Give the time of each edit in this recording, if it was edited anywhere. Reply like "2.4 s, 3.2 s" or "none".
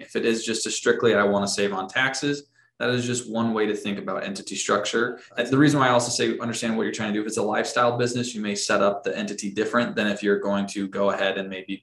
5.3 s